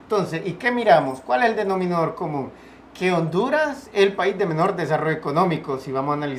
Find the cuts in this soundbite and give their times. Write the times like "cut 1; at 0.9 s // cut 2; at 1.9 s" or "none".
cut 1; at 3.0 s